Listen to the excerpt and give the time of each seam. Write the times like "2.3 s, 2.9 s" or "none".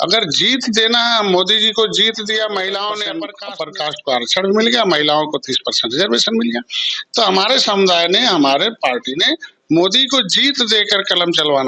3.4 s